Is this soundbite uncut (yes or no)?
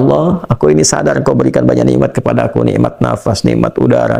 yes